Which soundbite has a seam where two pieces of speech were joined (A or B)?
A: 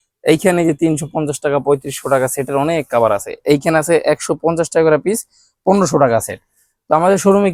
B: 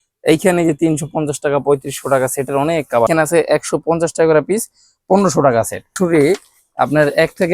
B